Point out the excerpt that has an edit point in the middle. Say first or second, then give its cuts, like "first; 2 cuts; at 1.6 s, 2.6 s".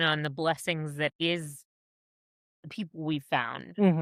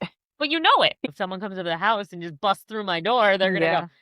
second; 1 cut; at 1.0 s